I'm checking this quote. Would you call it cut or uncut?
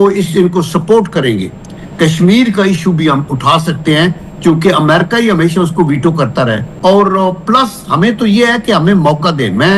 cut